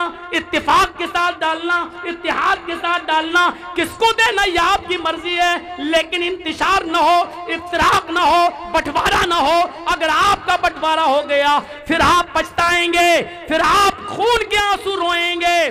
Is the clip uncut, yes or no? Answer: no